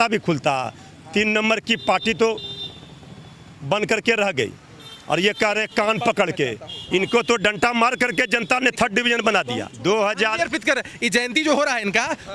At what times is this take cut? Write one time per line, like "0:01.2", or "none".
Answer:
0:09.7